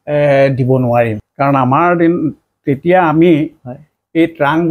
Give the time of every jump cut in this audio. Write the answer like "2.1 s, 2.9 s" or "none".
1.2 s